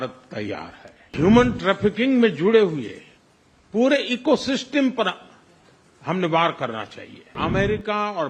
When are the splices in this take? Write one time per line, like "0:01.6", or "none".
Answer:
0:01.1
0:07.3